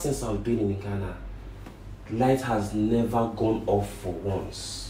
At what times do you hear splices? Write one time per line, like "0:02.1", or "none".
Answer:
none